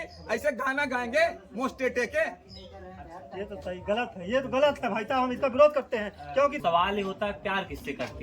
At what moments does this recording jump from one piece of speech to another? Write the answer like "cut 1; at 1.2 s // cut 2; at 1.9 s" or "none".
cut 1; at 6.5 s